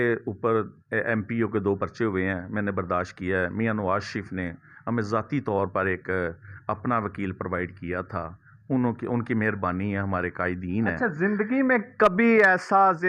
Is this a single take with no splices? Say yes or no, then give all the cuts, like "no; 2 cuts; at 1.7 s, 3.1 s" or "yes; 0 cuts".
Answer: yes; 0 cuts